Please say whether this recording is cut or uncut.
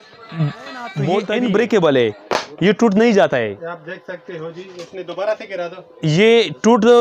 cut